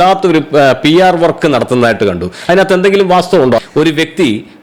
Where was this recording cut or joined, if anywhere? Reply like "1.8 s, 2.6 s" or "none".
3.6 s